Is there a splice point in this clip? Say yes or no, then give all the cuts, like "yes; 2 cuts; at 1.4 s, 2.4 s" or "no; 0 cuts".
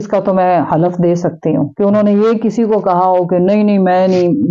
no; 0 cuts